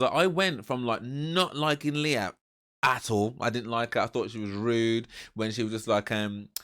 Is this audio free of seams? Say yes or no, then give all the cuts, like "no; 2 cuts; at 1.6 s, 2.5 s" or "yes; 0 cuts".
yes; 0 cuts